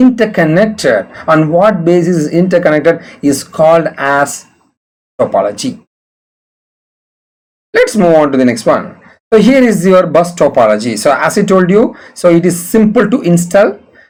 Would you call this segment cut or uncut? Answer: uncut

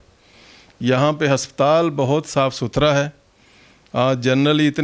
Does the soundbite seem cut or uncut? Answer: uncut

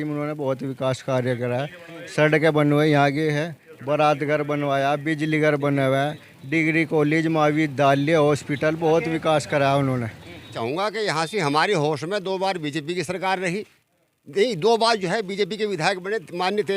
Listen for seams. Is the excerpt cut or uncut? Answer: cut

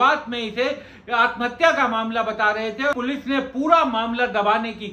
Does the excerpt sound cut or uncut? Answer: cut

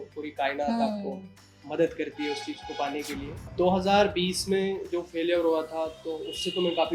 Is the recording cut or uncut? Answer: cut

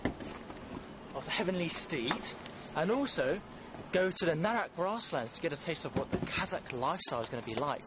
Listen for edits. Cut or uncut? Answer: uncut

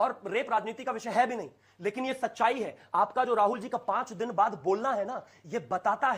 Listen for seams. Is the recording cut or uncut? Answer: uncut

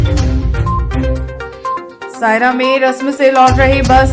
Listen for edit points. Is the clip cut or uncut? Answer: cut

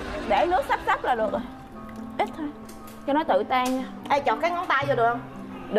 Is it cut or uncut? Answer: cut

